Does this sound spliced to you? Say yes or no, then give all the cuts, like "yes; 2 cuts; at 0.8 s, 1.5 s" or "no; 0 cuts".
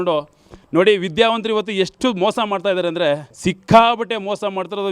yes; 1 cut; at 3.3 s